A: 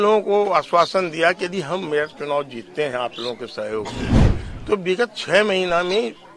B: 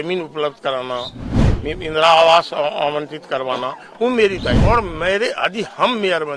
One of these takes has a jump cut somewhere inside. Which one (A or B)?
B